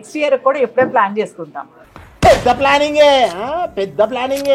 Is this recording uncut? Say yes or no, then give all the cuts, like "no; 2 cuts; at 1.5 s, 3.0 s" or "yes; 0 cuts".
yes; 0 cuts